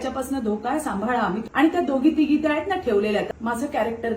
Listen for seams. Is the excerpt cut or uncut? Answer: cut